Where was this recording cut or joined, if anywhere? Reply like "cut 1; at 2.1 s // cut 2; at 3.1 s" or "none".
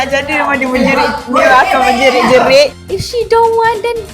cut 1; at 2.8 s